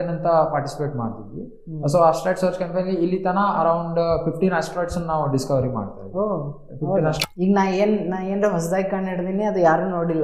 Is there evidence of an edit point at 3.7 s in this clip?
no; 1 cut; at 7.2 s

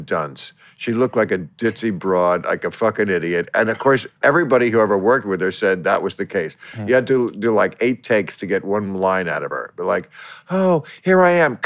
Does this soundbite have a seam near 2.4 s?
no; 0 cuts

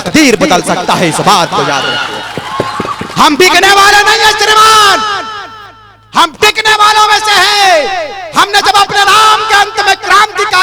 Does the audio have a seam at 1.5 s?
no; 0 cuts

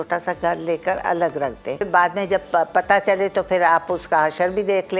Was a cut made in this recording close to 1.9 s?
yes; 1 cut; at 1.9 s

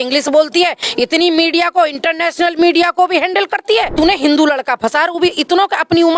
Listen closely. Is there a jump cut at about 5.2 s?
no; 1 cut; at 3.9 s

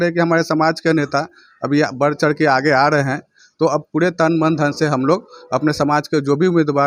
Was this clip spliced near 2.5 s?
no; 0 cuts

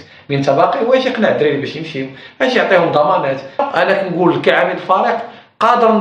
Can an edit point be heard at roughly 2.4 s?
no; 1 cut; at 3.6 s

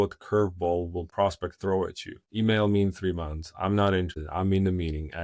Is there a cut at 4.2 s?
yes; 3 cuts; at 1.0 s, 2.2 s, 4.2 s

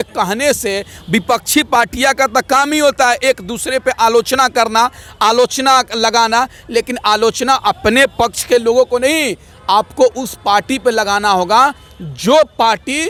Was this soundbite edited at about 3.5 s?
no; 0 cuts

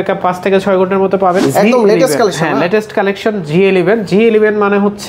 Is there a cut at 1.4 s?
yes; 1 cut; at 1.4 s

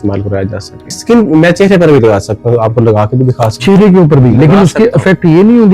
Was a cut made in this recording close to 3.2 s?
no; 1 cut; at 1.0 s

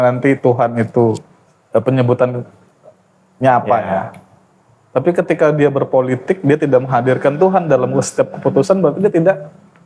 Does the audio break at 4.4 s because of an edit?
no; 0 cuts

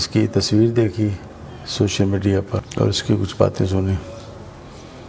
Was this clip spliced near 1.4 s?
no; 1 cut; at 2.7 s

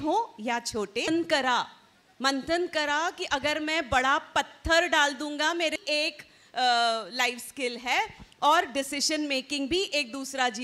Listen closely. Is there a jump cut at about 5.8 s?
yes; 2 cuts; at 1.1 s, 5.8 s

